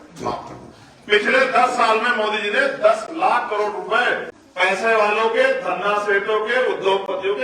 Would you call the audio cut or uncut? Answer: cut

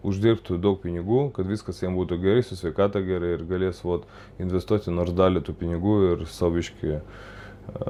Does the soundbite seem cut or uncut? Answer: uncut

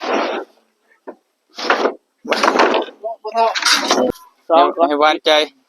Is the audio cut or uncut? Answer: cut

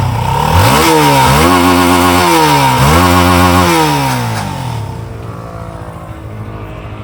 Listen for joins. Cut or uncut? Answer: uncut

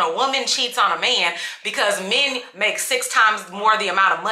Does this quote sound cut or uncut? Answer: uncut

